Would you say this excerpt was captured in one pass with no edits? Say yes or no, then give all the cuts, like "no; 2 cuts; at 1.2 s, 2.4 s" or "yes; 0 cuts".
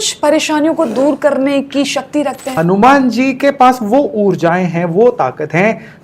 no; 1 cut; at 2.5 s